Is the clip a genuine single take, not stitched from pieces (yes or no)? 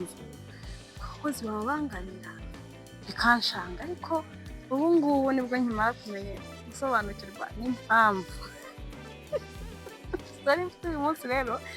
yes